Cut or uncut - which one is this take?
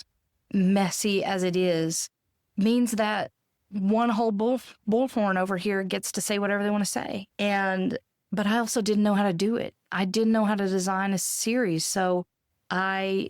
uncut